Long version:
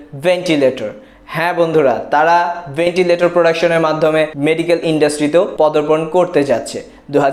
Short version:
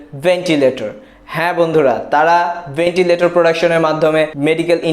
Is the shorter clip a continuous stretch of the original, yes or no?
yes